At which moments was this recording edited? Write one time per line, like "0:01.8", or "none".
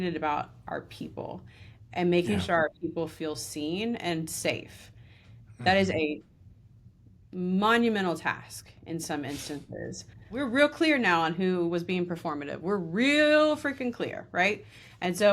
0:10.3